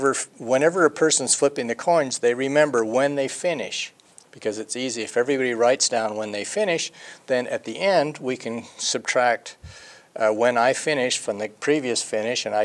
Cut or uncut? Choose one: uncut